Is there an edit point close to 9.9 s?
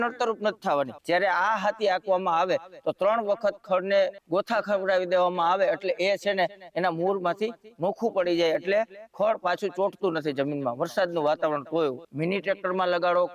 no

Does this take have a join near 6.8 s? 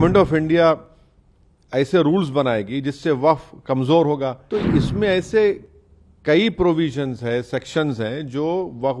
no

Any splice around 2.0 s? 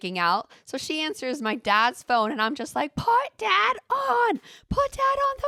no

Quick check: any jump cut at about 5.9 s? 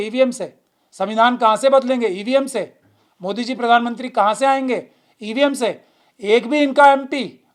no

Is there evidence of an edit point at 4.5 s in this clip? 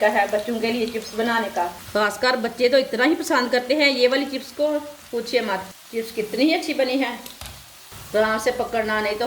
no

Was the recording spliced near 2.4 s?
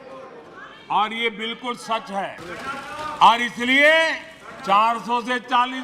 yes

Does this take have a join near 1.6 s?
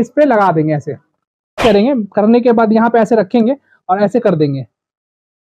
yes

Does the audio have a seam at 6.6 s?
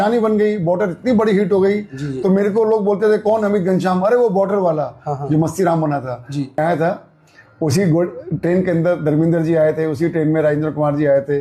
yes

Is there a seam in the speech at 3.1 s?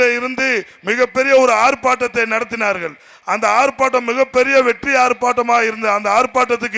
no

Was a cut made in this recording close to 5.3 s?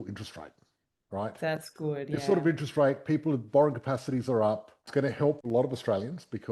yes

